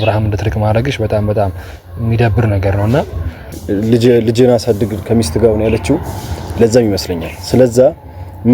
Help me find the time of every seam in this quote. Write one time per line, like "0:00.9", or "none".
0:03.5